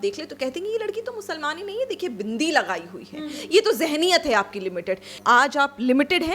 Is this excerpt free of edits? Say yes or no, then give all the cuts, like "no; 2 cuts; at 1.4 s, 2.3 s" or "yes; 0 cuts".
no; 1 cut; at 5.2 s